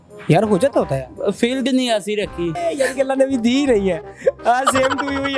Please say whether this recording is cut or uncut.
cut